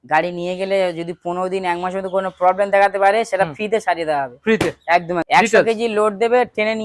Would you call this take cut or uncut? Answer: cut